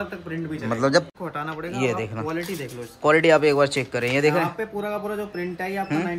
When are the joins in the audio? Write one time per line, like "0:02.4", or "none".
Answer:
0:01.1